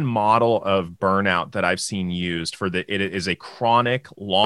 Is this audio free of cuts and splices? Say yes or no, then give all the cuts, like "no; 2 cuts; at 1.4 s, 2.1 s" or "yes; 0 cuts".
yes; 0 cuts